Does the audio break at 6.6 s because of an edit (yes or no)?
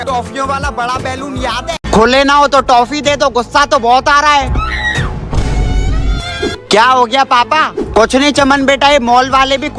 no